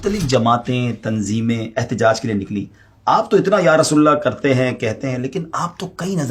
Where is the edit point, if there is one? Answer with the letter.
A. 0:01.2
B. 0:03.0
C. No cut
C